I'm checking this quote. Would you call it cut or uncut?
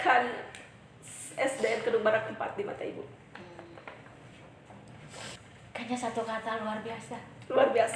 cut